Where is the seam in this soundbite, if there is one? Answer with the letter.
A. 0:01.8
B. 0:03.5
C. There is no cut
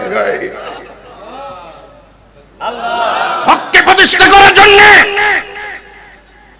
B